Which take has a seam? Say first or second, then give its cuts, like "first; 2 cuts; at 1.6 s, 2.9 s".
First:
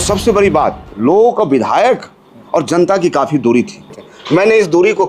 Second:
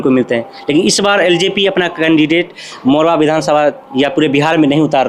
first; 2 cuts; at 0.9 s, 4.1 s